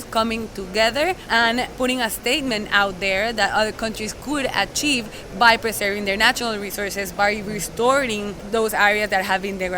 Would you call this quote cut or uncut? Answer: cut